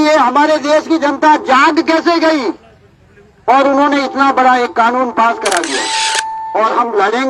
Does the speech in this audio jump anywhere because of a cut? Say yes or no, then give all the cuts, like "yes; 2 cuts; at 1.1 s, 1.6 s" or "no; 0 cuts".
yes; 1 cut; at 6.3 s